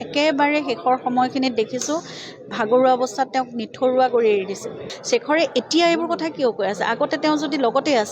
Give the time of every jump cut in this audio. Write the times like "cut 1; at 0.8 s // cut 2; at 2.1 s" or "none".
cut 1; at 4.9 s